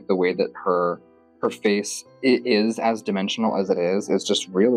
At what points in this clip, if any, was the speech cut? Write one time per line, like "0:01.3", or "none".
none